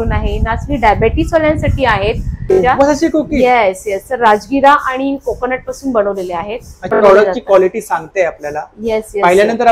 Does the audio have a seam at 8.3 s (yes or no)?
no